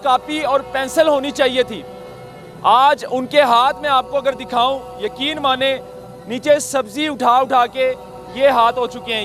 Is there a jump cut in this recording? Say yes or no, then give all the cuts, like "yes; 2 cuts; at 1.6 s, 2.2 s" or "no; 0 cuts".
no; 0 cuts